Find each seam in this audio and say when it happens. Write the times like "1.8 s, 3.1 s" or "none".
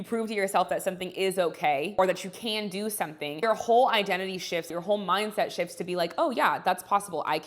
2.0 s, 3.4 s, 4.7 s